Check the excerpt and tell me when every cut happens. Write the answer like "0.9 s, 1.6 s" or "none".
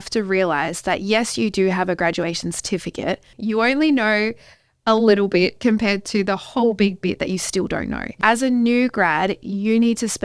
3.3 s, 8.2 s